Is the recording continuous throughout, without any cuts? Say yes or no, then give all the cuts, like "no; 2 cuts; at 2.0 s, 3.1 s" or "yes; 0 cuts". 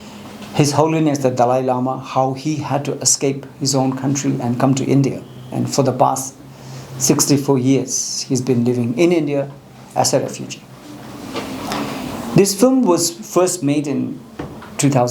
yes; 0 cuts